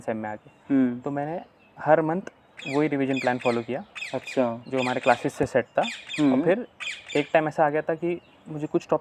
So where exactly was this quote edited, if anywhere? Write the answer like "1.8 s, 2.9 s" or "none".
none